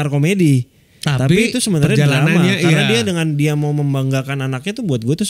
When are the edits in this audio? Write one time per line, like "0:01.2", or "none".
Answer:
none